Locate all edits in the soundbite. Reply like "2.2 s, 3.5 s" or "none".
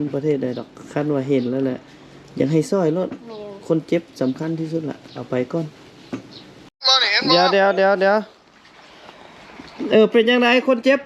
6.8 s